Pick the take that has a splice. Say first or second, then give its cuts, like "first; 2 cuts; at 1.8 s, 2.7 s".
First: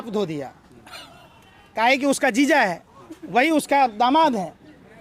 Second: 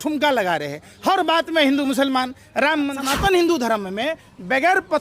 second; 1 cut; at 3.0 s